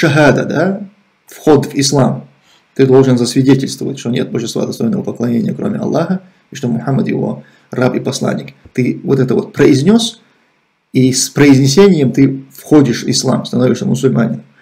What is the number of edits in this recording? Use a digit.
0